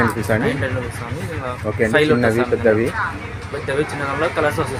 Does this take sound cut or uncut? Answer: uncut